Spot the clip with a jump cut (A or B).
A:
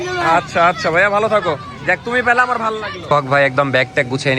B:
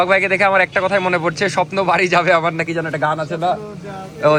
A